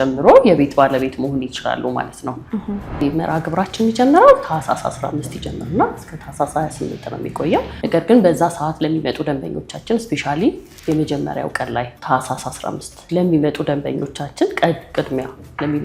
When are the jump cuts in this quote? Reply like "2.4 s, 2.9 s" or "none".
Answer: 3.0 s, 7.7 s